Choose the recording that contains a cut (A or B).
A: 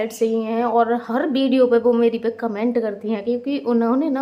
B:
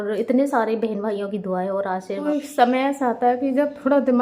B